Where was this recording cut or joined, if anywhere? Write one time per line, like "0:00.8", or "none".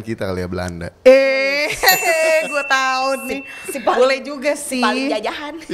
none